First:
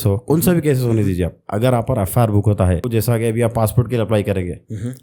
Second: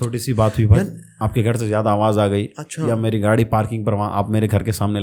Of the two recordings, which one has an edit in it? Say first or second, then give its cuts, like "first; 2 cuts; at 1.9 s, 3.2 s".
first; 1 cut; at 2.9 s